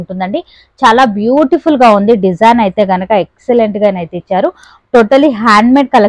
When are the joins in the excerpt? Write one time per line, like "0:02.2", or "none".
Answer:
none

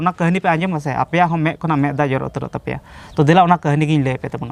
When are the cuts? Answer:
none

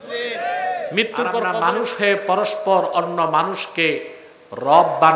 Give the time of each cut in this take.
0:01.4

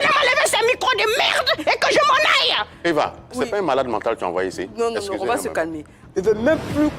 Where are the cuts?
0:06.0

